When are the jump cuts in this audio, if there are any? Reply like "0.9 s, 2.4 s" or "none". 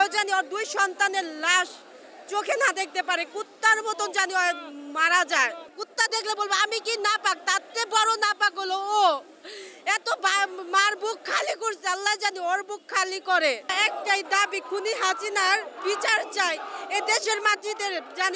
5.7 s, 13.7 s